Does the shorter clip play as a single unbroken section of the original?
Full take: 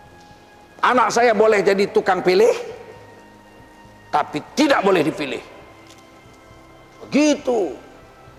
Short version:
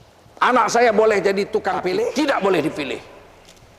no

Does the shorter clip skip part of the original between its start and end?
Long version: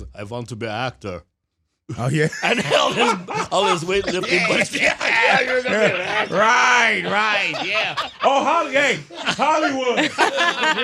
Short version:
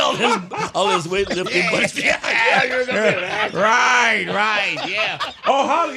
no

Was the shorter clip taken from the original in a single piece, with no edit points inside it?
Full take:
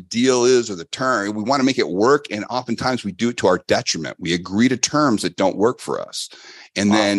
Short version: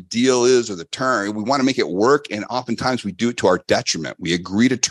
yes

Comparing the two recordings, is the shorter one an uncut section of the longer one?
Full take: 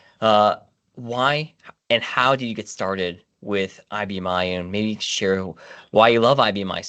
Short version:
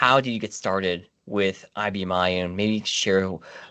yes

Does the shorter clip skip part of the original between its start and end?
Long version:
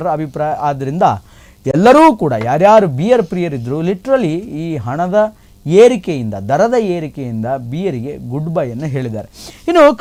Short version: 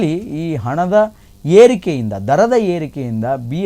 no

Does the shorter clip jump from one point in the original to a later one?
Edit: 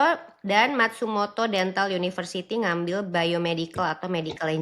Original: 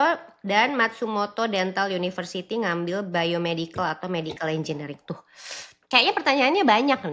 no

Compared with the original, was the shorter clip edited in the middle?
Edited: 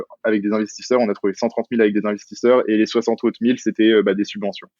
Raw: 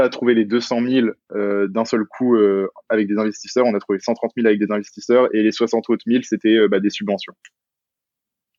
no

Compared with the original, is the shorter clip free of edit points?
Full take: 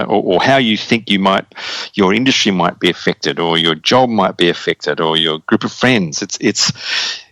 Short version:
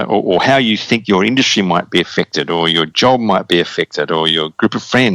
no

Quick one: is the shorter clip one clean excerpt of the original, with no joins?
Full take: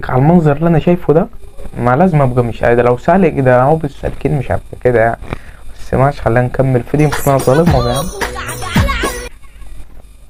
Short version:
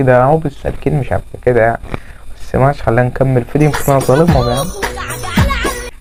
yes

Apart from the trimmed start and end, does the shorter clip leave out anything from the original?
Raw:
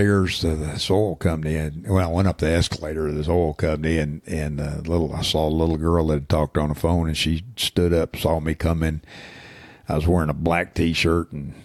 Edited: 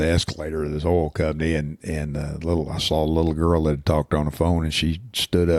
no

